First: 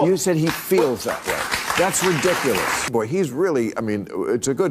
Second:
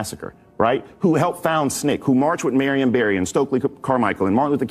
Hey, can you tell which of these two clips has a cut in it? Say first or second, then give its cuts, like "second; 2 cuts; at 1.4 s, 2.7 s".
first; 1 cut; at 2.9 s